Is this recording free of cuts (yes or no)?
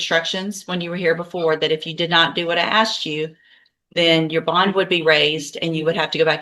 yes